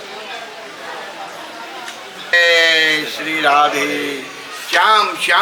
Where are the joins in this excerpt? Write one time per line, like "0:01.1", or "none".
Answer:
0:02.3